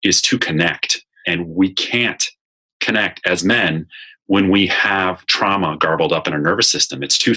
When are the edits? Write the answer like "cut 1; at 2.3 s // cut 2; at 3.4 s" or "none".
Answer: cut 1; at 1.1 s